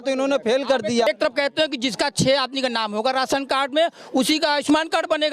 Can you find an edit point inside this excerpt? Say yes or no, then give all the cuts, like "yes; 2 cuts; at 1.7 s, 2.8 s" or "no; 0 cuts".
yes; 1 cut; at 1.1 s